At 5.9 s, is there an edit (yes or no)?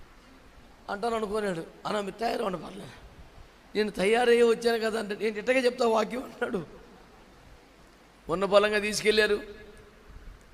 no